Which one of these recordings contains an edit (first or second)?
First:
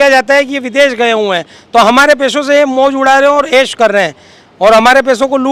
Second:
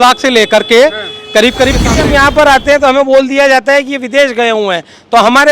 second